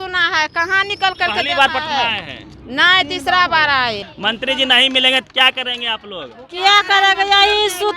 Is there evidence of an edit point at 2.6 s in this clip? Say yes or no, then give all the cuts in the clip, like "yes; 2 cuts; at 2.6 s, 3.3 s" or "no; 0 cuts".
no; 1 cut; at 4.1 s